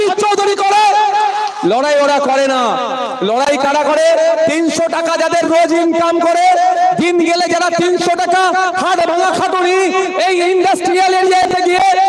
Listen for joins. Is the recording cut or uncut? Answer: uncut